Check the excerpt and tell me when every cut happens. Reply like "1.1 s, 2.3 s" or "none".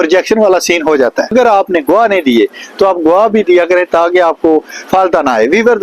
1.3 s

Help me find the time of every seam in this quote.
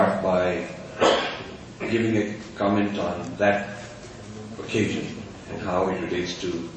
3.5 s

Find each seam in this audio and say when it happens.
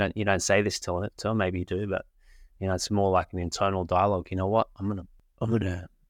5.2 s

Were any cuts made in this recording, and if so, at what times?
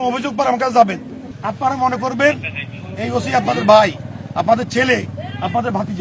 1.4 s

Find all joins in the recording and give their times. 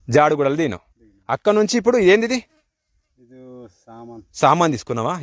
none

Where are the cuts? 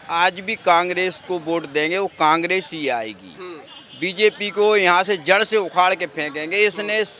none

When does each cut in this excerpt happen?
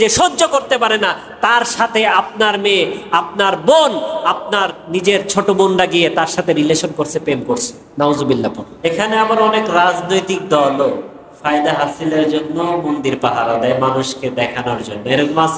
8.7 s

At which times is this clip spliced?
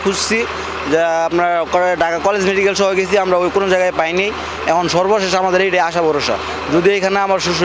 none

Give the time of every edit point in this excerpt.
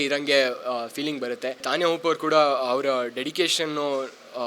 1.6 s

